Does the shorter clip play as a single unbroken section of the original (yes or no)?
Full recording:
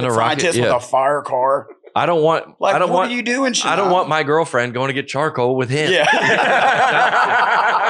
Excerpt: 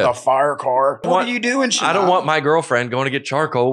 no